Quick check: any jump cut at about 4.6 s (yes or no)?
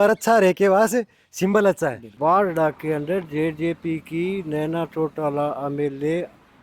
no